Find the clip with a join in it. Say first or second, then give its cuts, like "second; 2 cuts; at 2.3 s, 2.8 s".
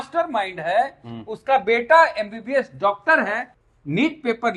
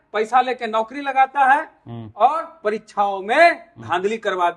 first; 1 cut; at 3.5 s